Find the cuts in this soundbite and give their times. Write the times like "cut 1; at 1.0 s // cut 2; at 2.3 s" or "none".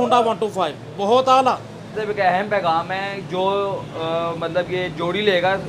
cut 1; at 2.0 s